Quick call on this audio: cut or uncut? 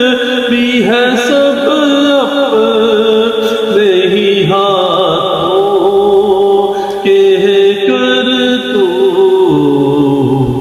uncut